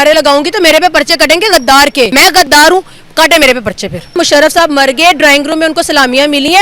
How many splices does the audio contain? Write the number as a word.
two